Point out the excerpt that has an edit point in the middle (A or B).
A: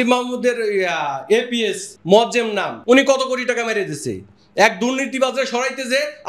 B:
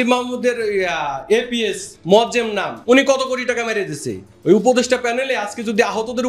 B